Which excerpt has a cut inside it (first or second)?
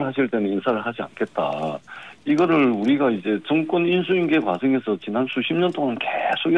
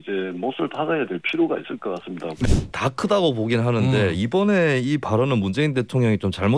second